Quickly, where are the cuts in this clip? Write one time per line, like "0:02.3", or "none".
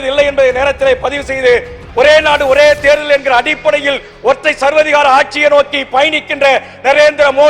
0:01.8